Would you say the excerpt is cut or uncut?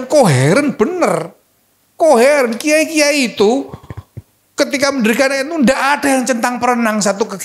uncut